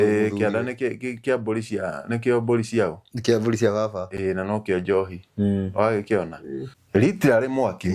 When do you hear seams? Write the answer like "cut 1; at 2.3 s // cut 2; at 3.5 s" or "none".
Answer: cut 1; at 6.8 s